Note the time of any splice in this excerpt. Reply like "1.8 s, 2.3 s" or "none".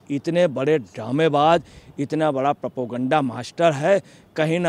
none